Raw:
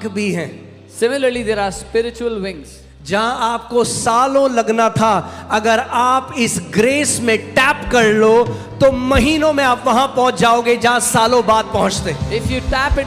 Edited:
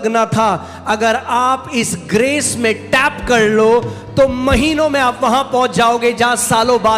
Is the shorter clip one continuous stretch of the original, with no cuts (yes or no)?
yes